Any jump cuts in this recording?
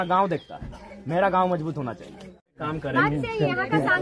yes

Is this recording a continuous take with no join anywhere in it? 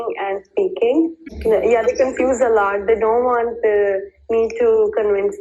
no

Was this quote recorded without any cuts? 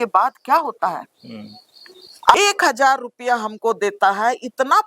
no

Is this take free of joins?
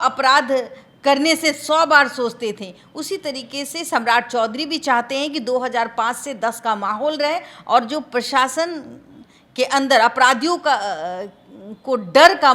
yes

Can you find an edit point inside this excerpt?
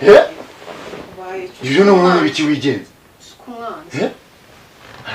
no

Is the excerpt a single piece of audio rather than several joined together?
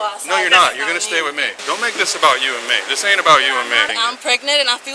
no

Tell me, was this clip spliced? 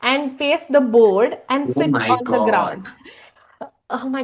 no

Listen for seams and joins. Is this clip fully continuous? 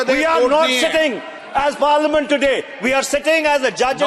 yes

